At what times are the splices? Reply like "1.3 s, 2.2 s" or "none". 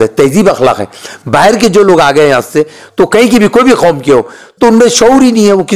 none